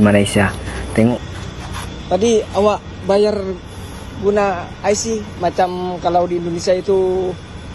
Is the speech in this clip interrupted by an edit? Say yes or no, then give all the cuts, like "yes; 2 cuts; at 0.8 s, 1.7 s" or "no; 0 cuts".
yes; 1 cut; at 1.2 s